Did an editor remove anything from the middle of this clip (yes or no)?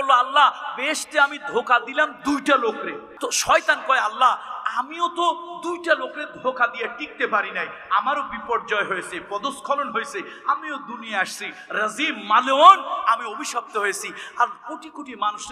yes